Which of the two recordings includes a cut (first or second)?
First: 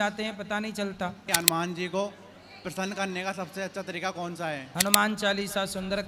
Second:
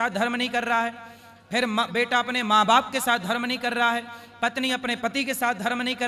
first